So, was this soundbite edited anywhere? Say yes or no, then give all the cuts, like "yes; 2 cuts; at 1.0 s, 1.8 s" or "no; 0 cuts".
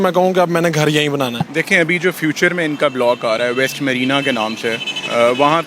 yes; 1 cut; at 1.4 s